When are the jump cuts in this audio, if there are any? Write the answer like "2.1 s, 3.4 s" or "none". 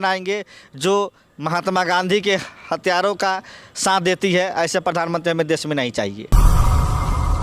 none

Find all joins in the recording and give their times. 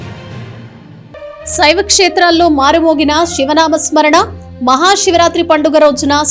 none

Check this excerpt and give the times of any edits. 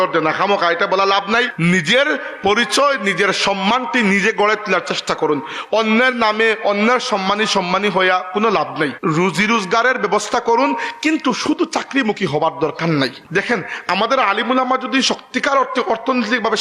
1.5 s, 9.0 s, 13.2 s

